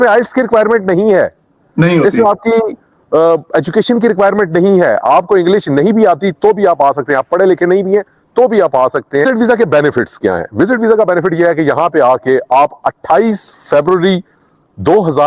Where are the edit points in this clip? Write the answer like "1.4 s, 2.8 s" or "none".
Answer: 9.2 s

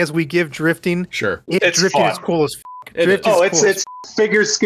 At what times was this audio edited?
none

